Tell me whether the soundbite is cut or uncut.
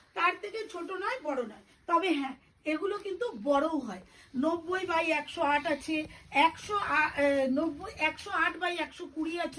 uncut